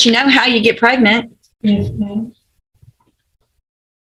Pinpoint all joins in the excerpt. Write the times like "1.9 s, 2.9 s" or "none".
none